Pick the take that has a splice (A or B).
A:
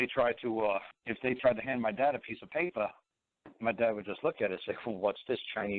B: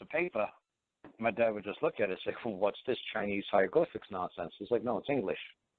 A